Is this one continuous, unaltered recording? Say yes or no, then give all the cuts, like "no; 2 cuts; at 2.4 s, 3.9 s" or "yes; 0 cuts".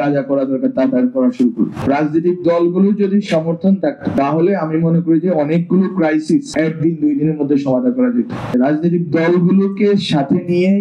no; 4 cuts; at 1.8 s, 4.2 s, 6.5 s, 8.5 s